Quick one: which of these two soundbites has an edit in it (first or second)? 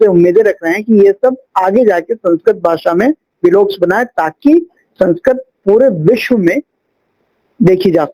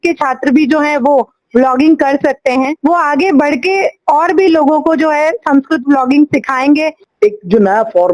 second